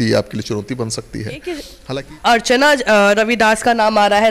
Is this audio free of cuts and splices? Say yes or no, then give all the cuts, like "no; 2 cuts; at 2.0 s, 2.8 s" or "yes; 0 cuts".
no; 1 cut; at 1.7 s